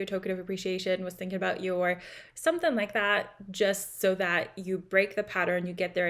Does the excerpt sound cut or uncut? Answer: uncut